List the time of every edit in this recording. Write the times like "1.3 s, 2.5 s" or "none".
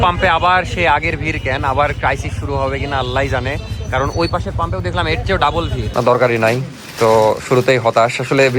5.9 s